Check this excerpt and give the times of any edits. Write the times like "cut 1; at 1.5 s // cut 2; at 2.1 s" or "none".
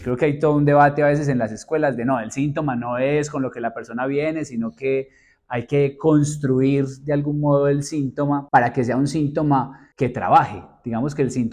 cut 1; at 8.4 s // cut 2; at 9.8 s